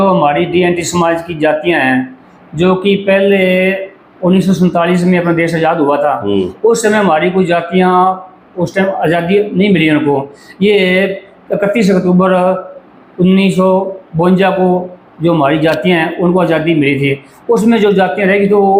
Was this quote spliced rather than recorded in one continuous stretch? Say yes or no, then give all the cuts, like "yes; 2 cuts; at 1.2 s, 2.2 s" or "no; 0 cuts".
no; 0 cuts